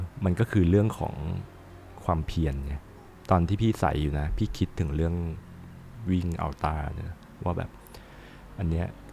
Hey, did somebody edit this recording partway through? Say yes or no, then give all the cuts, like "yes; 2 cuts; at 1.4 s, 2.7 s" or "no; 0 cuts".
yes; 2 cuts; at 3.0 s, 5.9 s